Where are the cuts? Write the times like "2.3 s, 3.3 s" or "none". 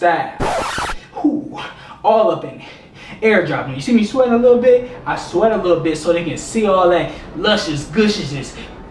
none